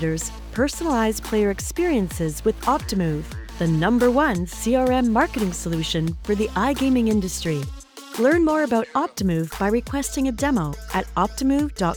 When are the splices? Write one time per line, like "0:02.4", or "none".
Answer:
none